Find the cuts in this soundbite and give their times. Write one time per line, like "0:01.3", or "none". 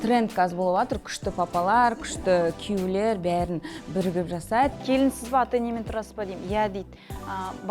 0:04.8